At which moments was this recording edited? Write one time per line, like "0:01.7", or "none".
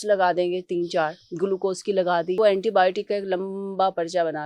0:02.4

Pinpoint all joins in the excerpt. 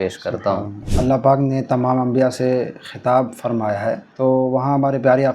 0:00.9
0:04.1

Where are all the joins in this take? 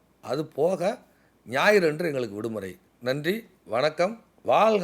0:02.8

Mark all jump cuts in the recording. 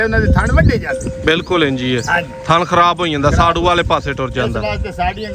none

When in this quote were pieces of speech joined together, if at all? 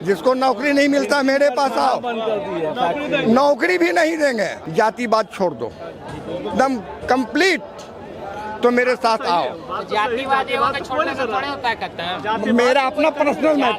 0:04.6

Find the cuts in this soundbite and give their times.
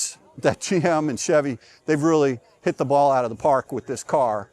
none

